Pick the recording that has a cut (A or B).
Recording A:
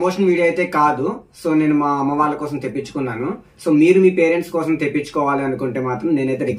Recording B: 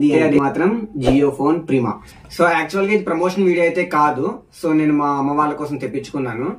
B